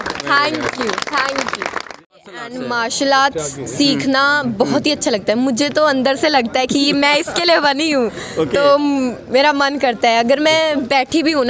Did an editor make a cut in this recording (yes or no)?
yes